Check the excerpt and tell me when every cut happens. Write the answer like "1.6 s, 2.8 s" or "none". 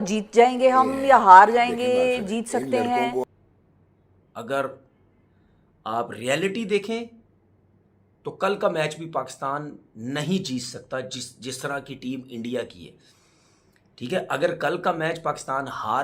3.2 s